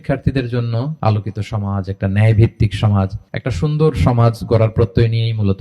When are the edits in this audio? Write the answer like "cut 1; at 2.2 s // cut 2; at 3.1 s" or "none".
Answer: cut 1; at 1.0 s